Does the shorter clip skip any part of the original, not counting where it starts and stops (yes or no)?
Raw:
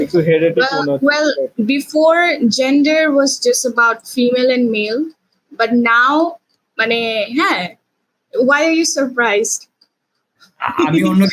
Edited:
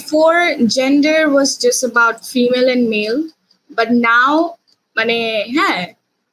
no